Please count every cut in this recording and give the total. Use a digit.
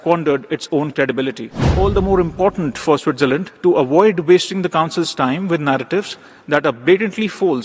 1